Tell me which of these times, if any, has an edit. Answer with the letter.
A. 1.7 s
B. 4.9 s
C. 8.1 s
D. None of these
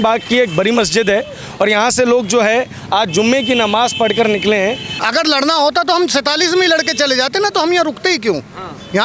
B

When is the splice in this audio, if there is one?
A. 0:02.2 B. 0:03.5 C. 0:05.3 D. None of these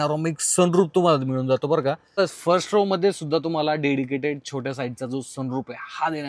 A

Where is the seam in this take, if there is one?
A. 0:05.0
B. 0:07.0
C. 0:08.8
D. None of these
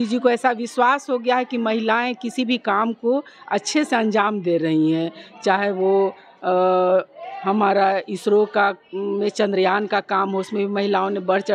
D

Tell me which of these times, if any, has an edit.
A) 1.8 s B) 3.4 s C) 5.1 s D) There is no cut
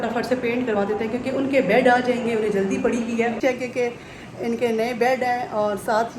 B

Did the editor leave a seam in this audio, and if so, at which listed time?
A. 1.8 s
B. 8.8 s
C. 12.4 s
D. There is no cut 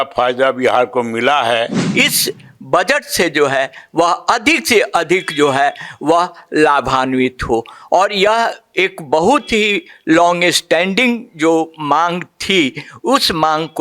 A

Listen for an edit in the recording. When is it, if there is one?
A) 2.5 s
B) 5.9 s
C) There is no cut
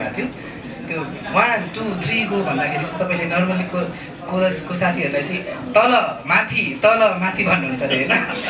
C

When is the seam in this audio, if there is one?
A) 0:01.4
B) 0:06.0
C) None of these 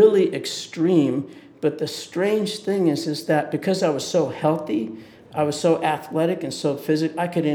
C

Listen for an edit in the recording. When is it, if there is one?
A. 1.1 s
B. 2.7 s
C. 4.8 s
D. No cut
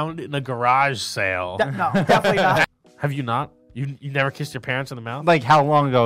B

